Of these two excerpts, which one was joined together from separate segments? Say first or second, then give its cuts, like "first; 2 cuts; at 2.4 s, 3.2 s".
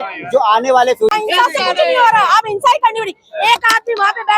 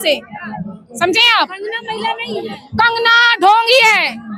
first; 1 cut; at 1.2 s